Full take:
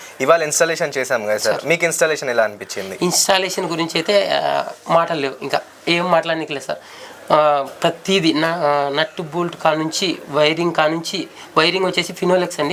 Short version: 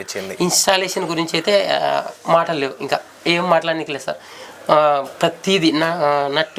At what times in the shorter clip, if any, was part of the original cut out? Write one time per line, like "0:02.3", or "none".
none